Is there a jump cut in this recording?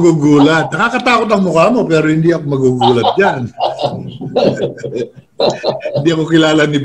no; 0 cuts

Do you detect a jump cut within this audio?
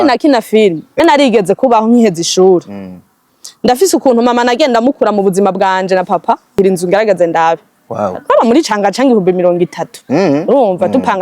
yes; 2 cuts; at 1.0 s, 6.6 s

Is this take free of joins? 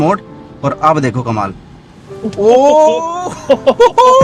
yes; 0 cuts

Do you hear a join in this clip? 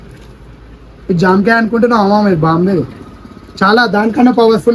no; 0 cuts

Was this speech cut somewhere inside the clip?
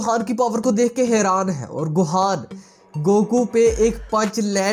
no; 0 cuts

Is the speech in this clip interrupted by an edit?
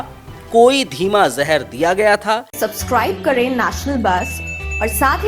yes; 1 cut; at 2.5 s

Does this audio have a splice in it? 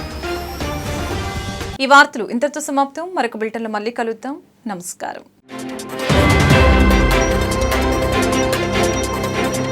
no; 0 cuts

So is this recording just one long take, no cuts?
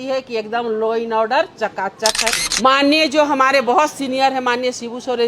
no; 1 cut; at 2.5 s

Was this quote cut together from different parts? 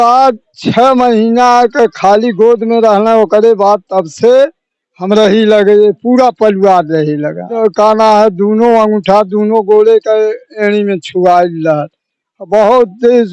yes; 1 cut; at 7.5 s

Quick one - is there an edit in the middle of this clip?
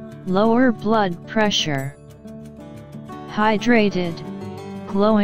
no; 0 cuts

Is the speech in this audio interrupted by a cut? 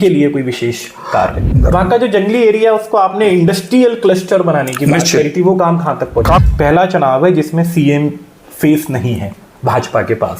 yes; 2 cuts; at 1.5 s, 6.4 s

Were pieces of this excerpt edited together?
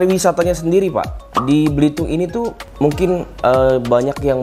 no; 0 cuts

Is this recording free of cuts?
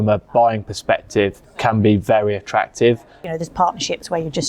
no; 2 cuts; at 1.4 s, 3.2 s

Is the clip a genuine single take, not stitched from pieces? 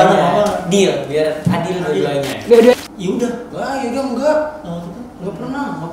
no; 1 cut; at 2.7 s

